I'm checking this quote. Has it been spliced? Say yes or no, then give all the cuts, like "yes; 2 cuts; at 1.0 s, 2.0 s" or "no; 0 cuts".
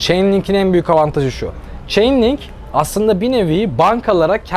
no; 0 cuts